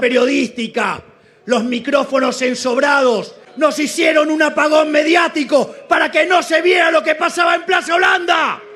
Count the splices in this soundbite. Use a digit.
1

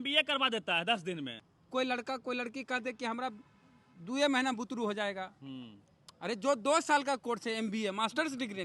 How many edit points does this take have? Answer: 1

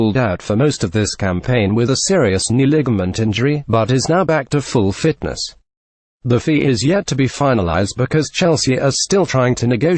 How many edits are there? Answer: 0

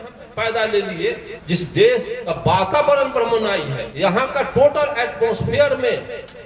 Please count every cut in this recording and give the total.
3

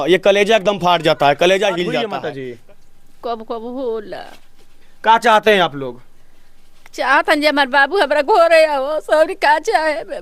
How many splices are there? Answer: 1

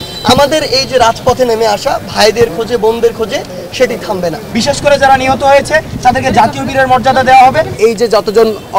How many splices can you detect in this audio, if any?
2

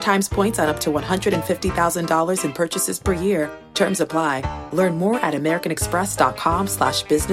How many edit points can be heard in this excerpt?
0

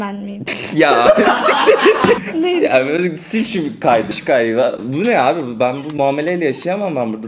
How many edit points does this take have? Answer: 2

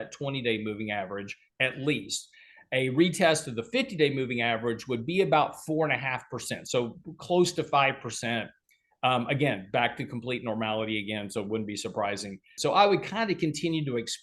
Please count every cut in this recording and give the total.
1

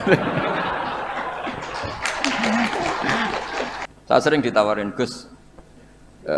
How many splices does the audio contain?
1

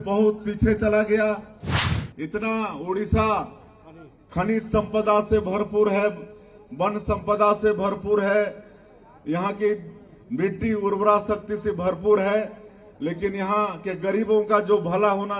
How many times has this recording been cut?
1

